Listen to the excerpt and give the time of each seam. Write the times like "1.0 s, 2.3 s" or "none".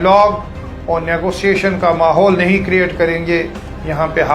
none